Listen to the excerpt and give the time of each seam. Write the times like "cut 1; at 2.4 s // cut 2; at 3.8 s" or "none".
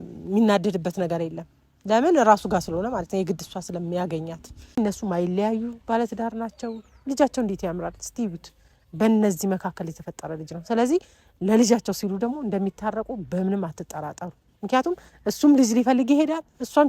cut 1; at 4.8 s